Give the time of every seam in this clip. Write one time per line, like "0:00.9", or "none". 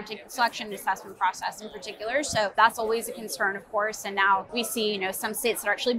0:02.5
0:04.5